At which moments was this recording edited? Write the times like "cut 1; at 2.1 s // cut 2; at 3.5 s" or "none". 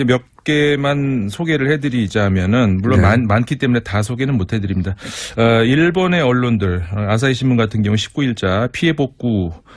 cut 1; at 3.0 s